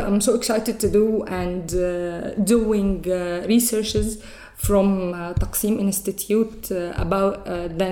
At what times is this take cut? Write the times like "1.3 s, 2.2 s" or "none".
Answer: none